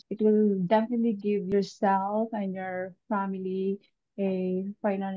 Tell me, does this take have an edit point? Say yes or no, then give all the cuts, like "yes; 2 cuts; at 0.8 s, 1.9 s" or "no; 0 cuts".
yes; 1 cut; at 1.4 s